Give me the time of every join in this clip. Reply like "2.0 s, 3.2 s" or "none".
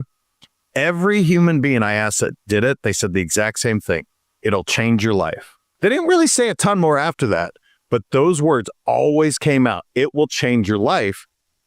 5.7 s